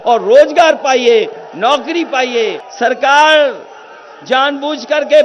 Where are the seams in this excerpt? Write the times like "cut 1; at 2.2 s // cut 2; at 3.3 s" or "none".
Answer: cut 1; at 2.6 s